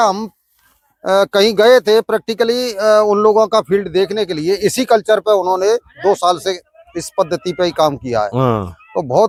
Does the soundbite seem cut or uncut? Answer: uncut